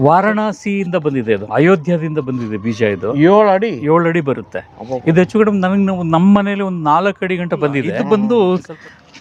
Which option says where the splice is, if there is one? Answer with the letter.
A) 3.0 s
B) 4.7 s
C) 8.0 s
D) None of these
C